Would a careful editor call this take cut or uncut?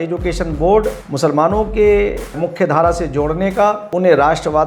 cut